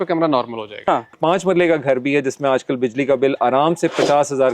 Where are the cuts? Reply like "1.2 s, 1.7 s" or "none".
1.1 s